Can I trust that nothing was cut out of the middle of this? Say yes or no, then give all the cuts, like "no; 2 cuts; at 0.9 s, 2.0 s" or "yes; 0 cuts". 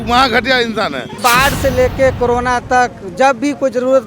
no; 1 cut; at 1.2 s